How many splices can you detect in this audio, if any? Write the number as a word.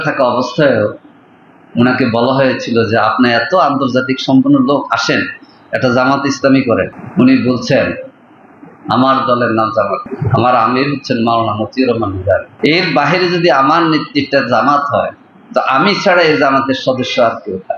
three